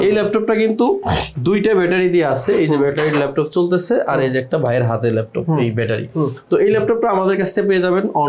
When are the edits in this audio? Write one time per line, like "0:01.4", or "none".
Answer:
none

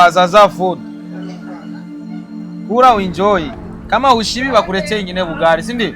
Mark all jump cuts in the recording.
0:00.9
0:02.2

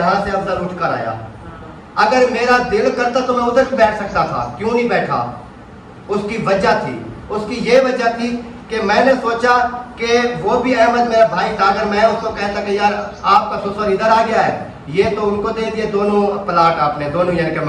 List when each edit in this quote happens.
none

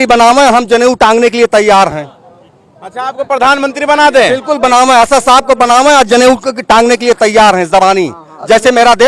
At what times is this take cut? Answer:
none

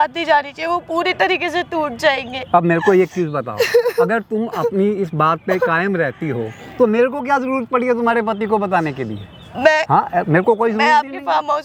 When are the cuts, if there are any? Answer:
none

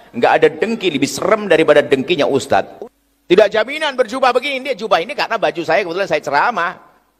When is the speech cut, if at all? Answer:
0:02.7

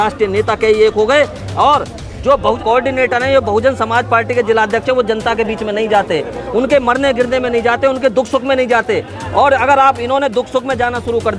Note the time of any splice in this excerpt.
0:02.6

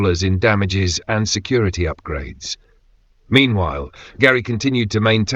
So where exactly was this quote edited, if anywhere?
none

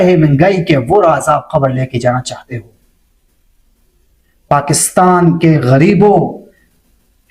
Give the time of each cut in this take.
none

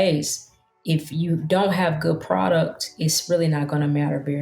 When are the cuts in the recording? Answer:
0:02.9

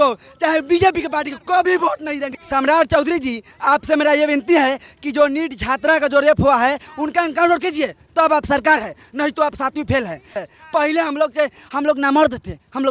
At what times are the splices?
0:02.3
0:10.4

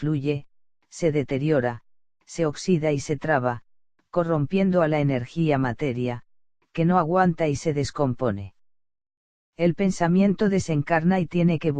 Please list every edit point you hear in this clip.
0:04.8

